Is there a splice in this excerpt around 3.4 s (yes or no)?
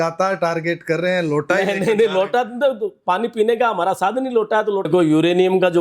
no